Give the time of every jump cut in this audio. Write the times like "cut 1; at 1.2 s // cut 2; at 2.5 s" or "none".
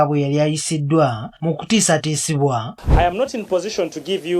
cut 1; at 2.8 s